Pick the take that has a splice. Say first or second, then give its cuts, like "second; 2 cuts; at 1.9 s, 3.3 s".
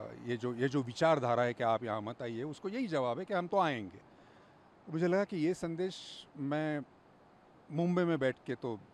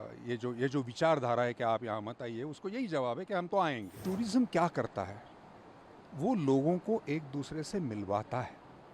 second; 1 cut; at 4.0 s